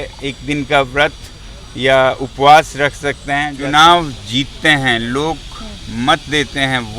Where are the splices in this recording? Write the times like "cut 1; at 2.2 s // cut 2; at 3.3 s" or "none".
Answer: cut 1; at 3.6 s